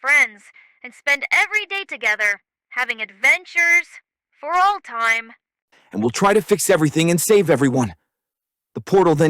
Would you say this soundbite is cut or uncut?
cut